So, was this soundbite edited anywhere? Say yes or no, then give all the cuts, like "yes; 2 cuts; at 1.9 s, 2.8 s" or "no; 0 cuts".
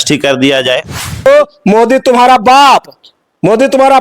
yes; 1 cut; at 1.3 s